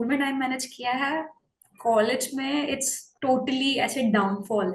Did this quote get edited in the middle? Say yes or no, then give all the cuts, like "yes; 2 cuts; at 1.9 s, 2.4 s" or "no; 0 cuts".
no; 0 cuts